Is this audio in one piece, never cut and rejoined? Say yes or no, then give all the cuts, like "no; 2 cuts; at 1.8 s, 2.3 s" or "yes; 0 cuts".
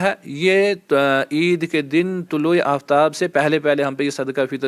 yes; 0 cuts